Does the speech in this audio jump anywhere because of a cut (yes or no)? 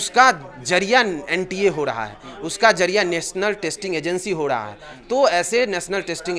no